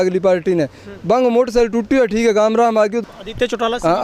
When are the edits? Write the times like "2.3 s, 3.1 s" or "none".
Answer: 3.0 s